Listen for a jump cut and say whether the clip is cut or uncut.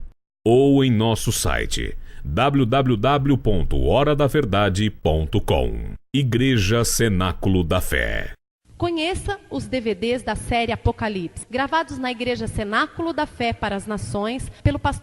cut